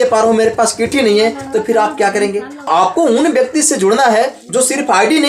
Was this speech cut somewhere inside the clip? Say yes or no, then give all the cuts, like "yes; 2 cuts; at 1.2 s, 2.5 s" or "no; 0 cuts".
yes; 1 cut; at 2.7 s